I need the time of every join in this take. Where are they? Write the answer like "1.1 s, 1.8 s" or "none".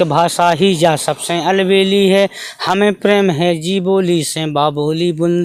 none